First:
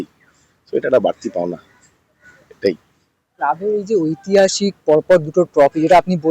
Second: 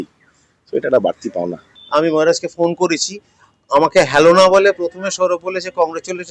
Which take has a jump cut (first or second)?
second